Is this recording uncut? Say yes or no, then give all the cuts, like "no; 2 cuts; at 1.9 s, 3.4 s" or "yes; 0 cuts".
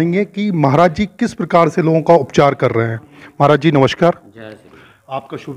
yes; 0 cuts